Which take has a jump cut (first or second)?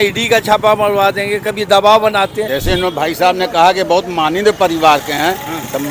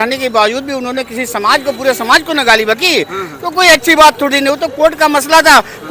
first